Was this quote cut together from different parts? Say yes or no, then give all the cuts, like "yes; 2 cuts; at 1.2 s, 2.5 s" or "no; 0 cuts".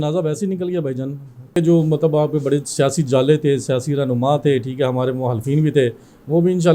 yes; 1 cut; at 1.5 s